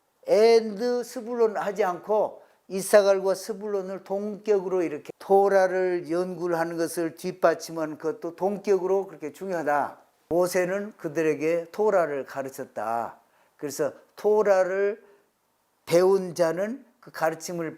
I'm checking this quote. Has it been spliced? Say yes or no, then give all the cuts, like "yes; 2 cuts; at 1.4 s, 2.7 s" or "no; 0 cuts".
yes; 2 cuts; at 5.1 s, 10.1 s